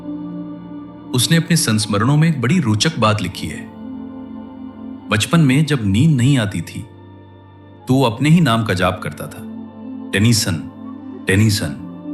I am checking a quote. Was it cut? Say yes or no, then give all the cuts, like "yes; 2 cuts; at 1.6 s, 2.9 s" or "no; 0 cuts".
yes; 2 cuts; at 3.4 s, 5.0 s